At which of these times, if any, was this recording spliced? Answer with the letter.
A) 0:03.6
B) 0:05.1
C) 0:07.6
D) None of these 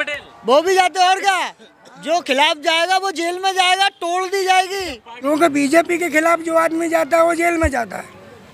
B